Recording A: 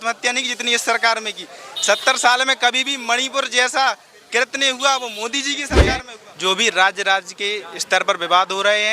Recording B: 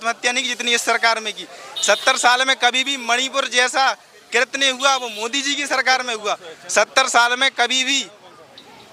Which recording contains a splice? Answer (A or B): A